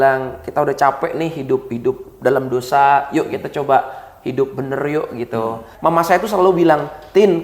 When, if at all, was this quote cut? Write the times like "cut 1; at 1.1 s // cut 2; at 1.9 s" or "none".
cut 1; at 5.7 s